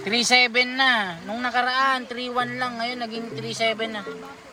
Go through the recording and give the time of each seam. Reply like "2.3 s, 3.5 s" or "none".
none